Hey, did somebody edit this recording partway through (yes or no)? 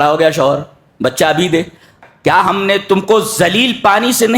yes